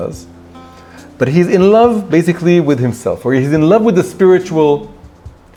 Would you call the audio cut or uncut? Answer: uncut